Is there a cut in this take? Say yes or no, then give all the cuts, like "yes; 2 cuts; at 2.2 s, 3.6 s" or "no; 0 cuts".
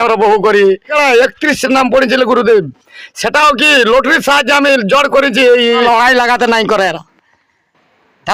yes; 2 cuts; at 0.9 s, 5.8 s